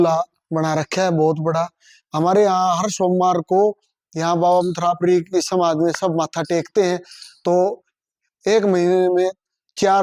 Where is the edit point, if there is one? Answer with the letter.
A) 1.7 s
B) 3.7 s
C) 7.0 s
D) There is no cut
D